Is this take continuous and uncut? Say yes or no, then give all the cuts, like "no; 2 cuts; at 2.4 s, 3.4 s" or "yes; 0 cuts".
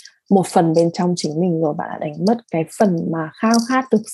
yes; 0 cuts